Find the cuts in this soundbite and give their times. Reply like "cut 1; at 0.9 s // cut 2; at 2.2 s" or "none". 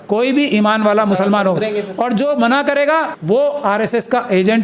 cut 1; at 3.1 s